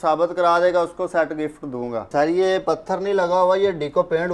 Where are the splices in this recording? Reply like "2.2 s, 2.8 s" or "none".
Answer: 2.1 s